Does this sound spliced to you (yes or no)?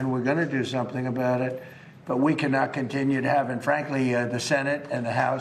no